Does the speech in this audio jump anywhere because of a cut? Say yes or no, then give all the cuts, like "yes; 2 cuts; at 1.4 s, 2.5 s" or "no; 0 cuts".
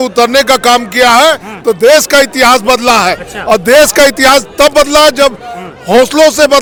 no; 0 cuts